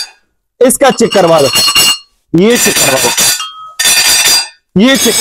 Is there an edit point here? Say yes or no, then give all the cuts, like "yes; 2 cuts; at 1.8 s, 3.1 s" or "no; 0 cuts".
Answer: no; 0 cuts